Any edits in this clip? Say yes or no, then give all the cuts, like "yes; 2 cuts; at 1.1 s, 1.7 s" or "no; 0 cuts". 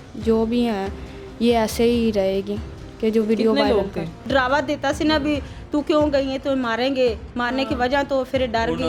yes; 1 cut; at 4.2 s